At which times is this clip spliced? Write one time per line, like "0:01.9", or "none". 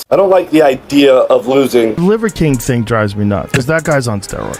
0:02.0